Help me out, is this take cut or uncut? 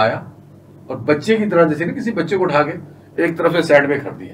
uncut